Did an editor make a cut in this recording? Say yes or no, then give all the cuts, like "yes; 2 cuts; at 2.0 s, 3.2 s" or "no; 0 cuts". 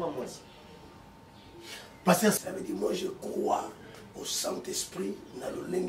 yes; 1 cut; at 2.4 s